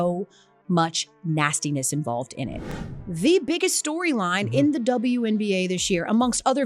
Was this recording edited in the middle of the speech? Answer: yes; 1 cut; at 2.8 s

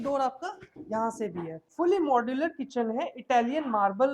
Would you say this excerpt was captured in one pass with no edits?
no; 1 cut; at 1.6 s

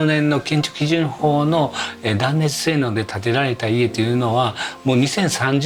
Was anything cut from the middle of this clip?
no; 0 cuts

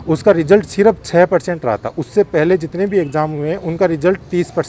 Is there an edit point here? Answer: no; 0 cuts

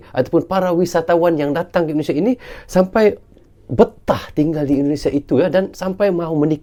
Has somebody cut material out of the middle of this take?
no; 0 cuts

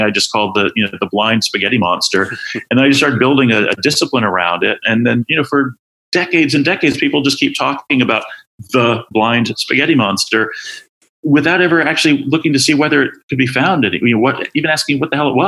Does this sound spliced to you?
no; 0 cuts

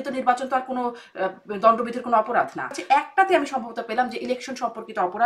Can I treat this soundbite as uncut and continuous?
no; 1 cut; at 2.7 s

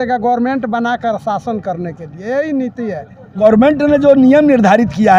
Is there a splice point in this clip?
yes; 1 cut; at 3.4 s

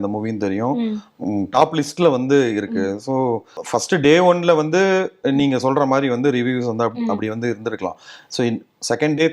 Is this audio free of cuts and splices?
no; 1 cut; at 3.6 s

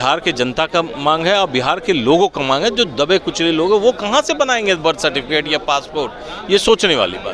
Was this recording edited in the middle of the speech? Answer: no; 0 cuts

